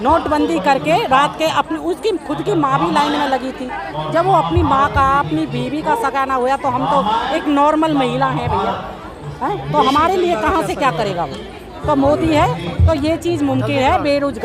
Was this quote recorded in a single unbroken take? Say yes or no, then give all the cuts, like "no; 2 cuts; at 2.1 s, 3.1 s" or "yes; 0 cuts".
yes; 0 cuts